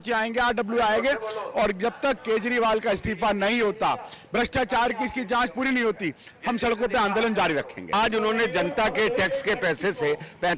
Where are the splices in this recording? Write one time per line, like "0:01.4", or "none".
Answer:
0:07.9